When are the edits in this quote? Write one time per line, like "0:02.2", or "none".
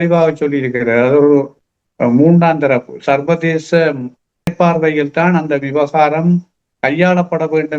none

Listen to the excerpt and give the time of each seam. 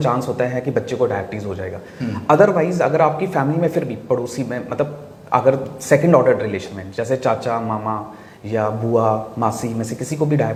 none

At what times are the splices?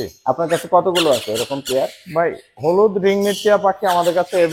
none

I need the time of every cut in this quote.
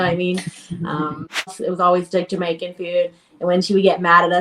0:01.6

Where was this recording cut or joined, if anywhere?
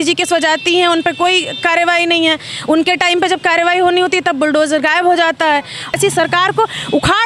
0:05.9

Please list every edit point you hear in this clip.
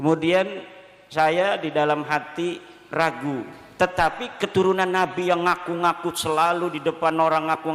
0:03.6

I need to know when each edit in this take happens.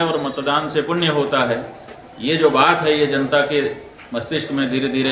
none

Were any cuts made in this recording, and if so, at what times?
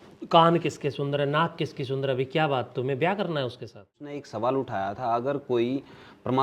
0:04.2

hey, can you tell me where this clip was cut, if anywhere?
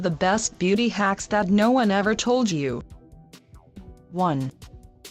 none

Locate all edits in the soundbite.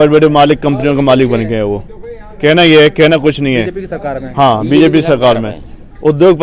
none

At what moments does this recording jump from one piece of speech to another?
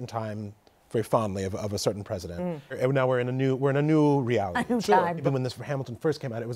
0:02.8
0:05.2

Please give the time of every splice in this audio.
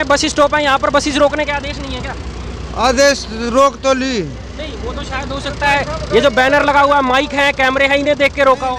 none

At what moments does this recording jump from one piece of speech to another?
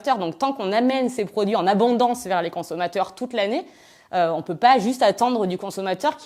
none

